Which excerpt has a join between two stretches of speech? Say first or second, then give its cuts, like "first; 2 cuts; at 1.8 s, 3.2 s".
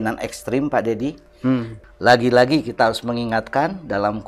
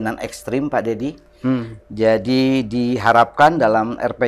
first; 1 cut; at 1.8 s